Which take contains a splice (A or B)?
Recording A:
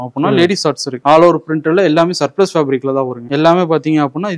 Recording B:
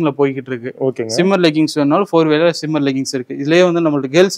A